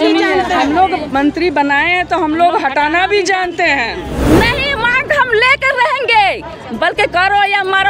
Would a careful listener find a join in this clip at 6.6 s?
no; 1 cut; at 4.2 s

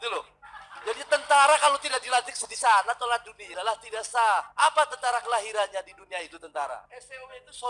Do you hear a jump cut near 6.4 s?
no; 1 cut; at 3.5 s

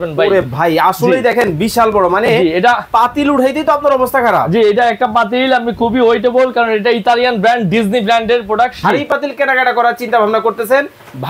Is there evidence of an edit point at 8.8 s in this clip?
yes; 1 cut; at 8.8 s

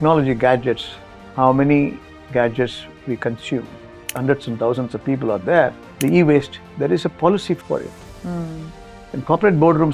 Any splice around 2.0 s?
no; 3 cuts; at 4.1 s, 5.9 s, 7.6 s

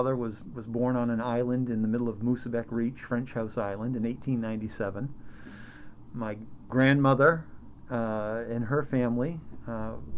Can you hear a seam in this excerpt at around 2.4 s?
no; 1 cut; at 6.6 s

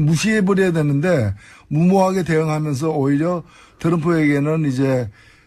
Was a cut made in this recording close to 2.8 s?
no; 0 cuts

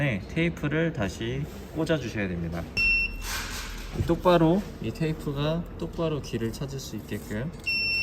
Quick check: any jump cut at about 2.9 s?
yes; 1 cut; at 2.9 s

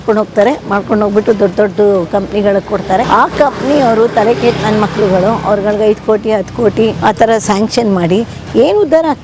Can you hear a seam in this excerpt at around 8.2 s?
no; 2 cuts; at 3.1 s, 7.0 s

